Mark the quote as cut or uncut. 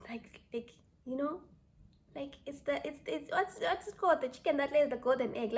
uncut